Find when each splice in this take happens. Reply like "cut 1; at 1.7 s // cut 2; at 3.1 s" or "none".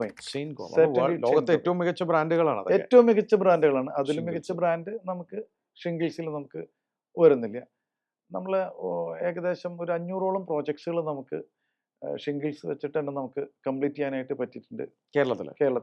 none